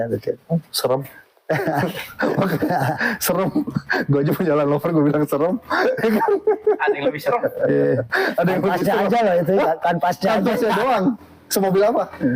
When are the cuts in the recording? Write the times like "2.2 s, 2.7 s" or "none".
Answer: none